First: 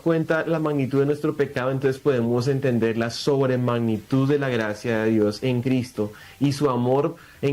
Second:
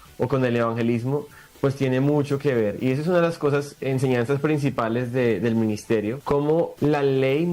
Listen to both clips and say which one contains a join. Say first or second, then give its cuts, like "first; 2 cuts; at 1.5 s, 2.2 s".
second; 1 cut; at 6.6 s